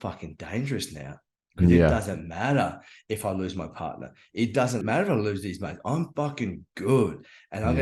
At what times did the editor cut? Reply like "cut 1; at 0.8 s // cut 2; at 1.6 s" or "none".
cut 1; at 4.8 s